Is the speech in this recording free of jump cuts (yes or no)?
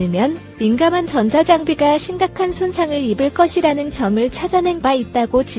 yes